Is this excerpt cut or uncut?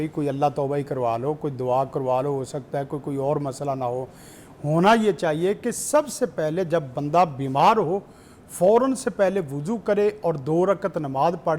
uncut